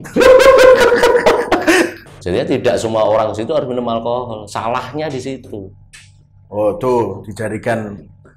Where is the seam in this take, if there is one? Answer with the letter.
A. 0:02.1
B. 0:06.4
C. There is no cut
A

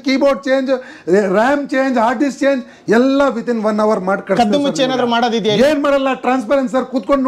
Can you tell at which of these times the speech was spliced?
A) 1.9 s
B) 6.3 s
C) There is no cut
C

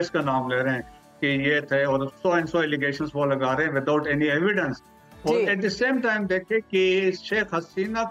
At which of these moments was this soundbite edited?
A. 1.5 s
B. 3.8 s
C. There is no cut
C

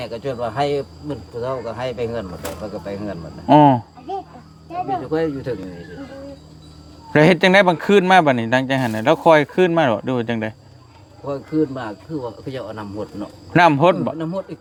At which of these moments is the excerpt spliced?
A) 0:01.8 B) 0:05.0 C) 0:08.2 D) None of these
D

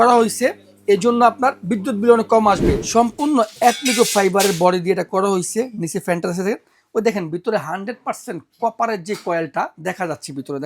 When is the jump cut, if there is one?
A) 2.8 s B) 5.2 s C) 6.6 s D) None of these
A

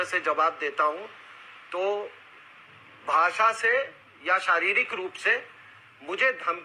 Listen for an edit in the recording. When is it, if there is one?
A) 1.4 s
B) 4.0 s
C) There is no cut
A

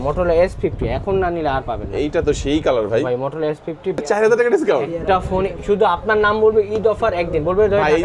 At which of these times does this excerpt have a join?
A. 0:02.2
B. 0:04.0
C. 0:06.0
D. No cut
B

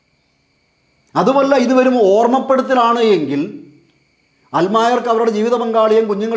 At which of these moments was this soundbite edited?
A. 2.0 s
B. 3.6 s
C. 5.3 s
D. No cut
D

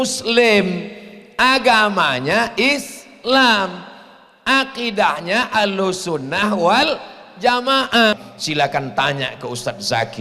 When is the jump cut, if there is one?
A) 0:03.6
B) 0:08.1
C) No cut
B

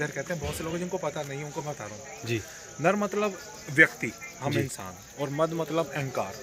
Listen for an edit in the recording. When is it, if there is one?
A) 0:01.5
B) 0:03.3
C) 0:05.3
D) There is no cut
D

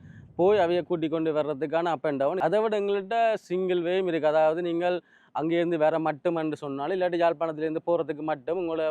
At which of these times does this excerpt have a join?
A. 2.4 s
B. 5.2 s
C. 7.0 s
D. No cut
A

